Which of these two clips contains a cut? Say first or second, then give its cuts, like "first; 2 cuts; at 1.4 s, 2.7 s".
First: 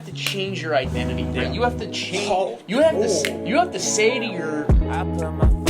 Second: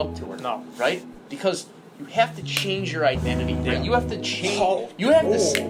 first; 1 cut; at 4.6 s